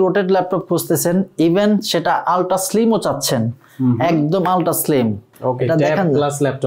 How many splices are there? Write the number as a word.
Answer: one